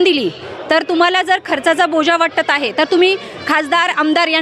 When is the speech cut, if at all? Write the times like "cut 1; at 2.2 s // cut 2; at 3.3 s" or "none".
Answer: none

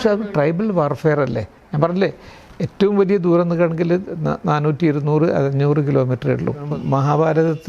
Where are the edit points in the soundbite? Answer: cut 1; at 6.7 s

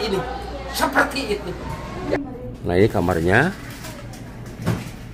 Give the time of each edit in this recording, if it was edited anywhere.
cut 1; at 2.3 s

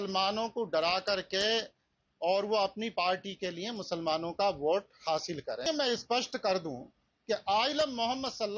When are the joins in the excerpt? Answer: cut 1; at 5.6 s

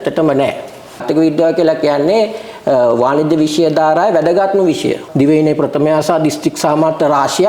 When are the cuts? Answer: cut 1; at 1.0 s // cut 2; at 5.0 s

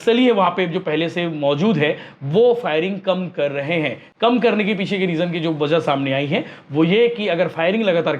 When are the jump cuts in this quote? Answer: none

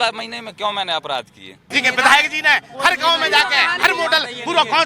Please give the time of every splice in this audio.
cut 1; at 1.7 s

